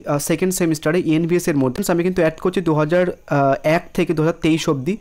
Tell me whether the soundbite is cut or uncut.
cut